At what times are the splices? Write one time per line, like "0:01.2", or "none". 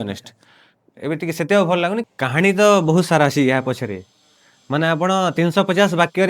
0:02.0